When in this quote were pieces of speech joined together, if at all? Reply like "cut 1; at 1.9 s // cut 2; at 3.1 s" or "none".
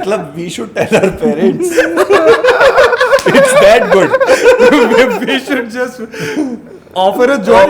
none